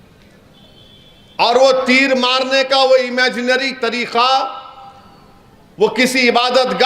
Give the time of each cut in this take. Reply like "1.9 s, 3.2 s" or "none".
none